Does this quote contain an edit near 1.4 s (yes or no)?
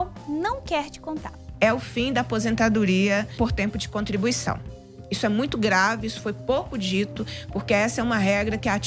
yes